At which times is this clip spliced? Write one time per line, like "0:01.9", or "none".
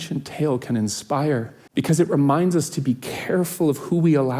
0:01.6